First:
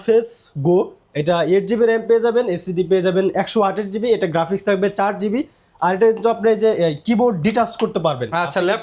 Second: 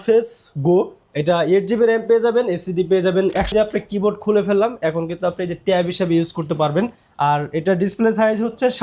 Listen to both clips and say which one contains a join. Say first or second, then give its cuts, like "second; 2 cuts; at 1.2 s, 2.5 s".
second; 1 cut; at 3.5 s